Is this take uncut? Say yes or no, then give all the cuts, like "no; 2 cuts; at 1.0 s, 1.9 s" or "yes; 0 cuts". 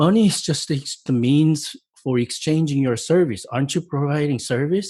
no; 1 cut; at 1.0 s